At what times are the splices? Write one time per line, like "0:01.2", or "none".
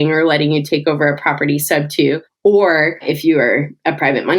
0:02.3
0:03.0

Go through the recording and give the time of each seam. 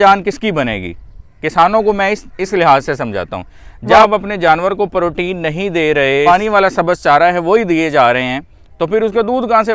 0:04.0
0:06.2

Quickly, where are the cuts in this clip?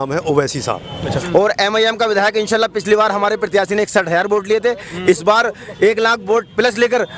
0:01.1

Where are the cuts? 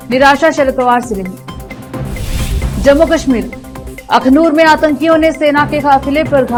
none

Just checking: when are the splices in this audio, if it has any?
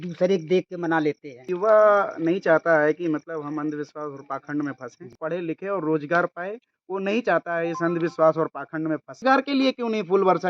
0:01.5
0:05.2
0:09.2

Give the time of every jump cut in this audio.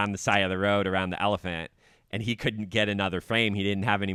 none

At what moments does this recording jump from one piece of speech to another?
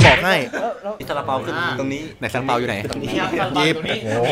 0:00.9

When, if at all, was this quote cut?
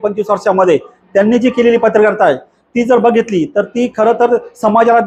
none

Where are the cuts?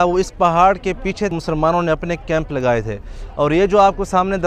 0:01.3

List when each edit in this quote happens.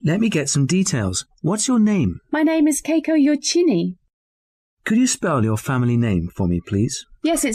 none

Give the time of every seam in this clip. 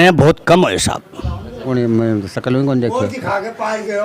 0:01.7

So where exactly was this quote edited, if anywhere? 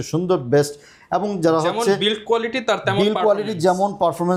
none

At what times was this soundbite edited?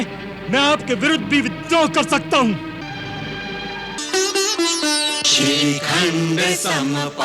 0:04.0

